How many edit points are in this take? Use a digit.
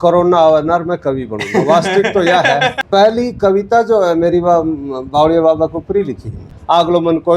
2